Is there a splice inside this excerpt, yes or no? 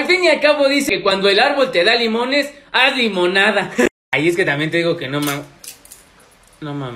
yes